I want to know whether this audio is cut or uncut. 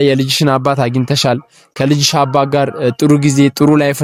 uncut